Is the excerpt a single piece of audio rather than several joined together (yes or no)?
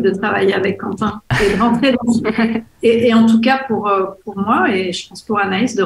yes